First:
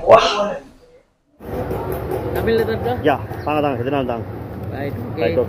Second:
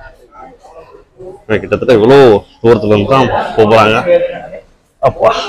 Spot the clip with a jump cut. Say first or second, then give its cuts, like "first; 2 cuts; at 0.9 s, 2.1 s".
first; 1 cut; at 1.5 s